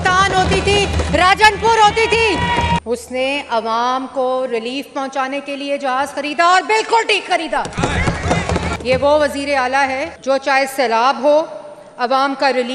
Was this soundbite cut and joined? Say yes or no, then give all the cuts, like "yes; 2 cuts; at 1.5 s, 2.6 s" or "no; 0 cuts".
yes; 3 cuts; at 2.8 s, 8.7 s, 10.1 s